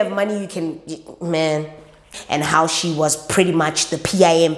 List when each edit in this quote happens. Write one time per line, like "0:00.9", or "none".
0:02.1